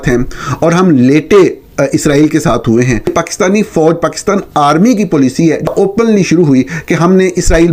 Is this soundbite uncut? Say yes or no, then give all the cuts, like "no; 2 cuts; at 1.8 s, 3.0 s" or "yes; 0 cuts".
no; 2 cuts; at 3.1 s, 5.7 s